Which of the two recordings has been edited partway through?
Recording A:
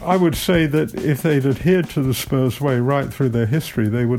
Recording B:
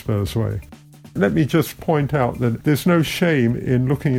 B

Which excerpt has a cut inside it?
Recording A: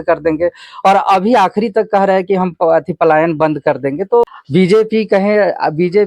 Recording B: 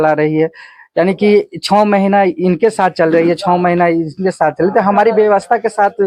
A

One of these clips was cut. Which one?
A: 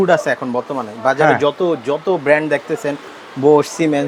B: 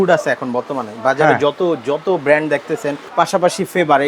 B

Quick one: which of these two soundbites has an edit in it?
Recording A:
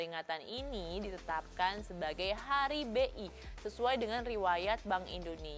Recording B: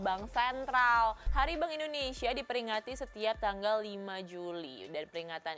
B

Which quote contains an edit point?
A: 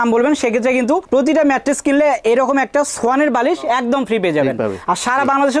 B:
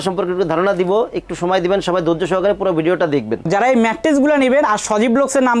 B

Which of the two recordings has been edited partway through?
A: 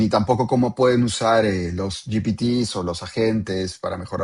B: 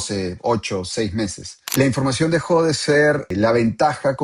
B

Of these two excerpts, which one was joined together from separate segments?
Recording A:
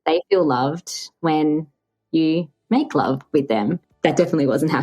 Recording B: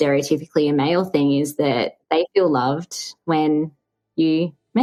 A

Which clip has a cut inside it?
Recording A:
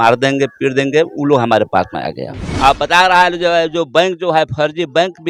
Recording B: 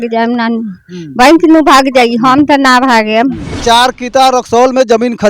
B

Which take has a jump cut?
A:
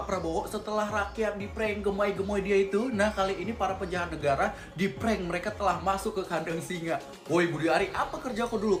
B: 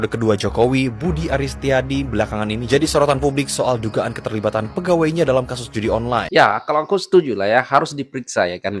B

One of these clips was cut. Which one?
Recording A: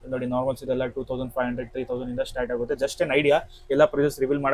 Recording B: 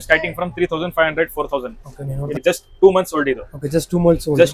B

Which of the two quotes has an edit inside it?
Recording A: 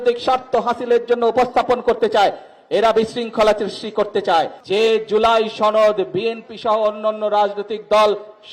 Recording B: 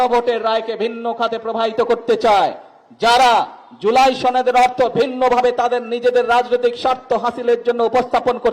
A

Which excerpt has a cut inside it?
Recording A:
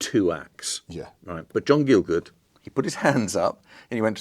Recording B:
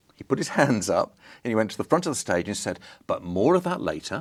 A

